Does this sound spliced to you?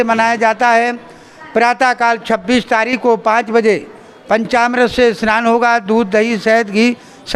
no; 0 cuts

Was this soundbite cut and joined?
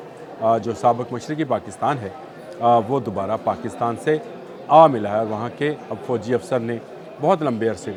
no; 0 cuts

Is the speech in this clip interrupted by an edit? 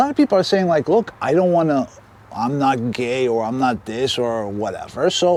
no; 0 cuts

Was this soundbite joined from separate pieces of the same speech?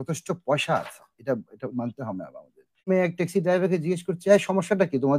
yes; 1 cut; at 2.9 s

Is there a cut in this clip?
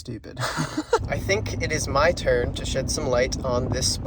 yes; 1 cut; at 1.0 s

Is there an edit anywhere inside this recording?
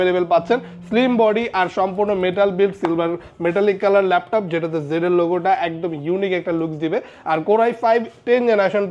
no; 0 cuts

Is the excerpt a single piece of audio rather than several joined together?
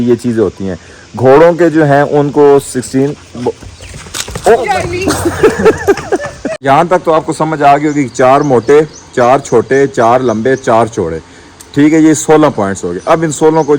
no; 1 cut; at 6.5 s

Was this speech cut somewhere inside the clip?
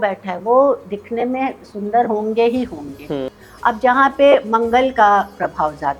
yes; 1 cut; at 3.4 s

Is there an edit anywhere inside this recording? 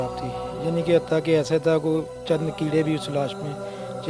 no; 0 cuts

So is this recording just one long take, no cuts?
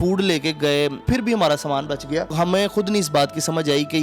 no; 2 cuts; at 1.0 s, 2.3 s

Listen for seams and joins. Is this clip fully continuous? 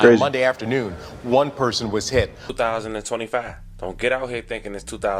no; 1 cut; at 2.5 s

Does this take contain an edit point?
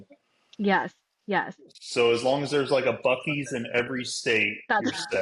no; 0 cuts

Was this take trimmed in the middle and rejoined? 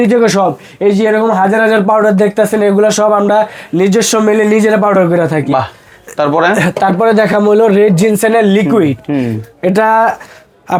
no; 0 cuts

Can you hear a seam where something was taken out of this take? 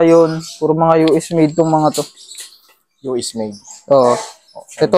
no; 0 cuts

